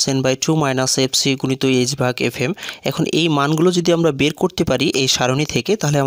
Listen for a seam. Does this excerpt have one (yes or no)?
no